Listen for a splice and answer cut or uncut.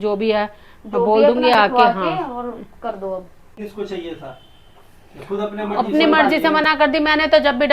cut